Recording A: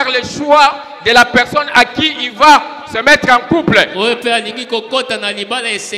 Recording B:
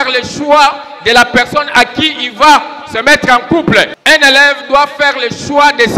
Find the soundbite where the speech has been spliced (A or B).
B